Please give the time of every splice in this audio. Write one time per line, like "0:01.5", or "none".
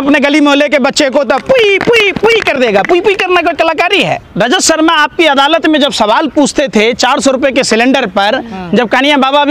0:04.2